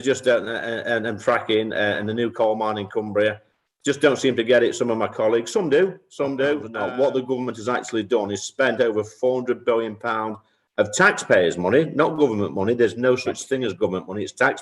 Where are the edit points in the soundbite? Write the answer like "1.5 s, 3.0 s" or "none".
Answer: 6.7 s